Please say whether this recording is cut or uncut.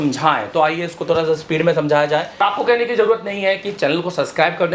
cut